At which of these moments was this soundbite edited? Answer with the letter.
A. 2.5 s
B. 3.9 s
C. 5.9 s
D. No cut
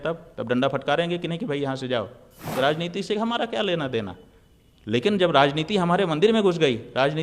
A